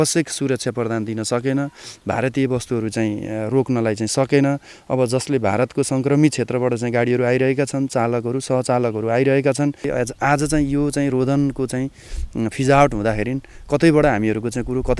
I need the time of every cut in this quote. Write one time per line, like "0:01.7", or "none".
0:09.8